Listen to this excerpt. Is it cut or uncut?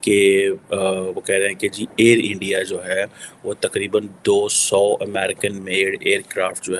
uncut